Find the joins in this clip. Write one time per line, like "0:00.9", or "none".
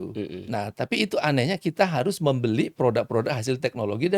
none